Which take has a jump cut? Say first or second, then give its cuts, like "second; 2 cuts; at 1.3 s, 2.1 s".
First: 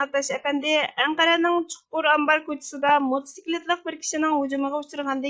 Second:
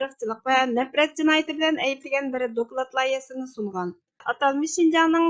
second; 1 cut; at 4.3 s